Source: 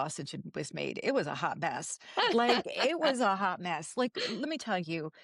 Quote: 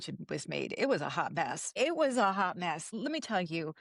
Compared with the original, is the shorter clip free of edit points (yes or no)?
no